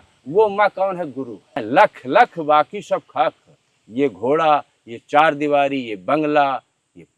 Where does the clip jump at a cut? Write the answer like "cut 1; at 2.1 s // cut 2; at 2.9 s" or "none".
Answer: cut 1; at 1.5 s